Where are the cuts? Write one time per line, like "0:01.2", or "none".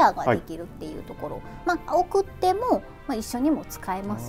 none